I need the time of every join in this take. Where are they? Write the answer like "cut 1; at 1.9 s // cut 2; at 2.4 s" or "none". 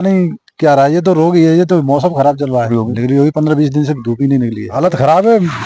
cut 1; at 2.7 s // cut 2; at 4.7 s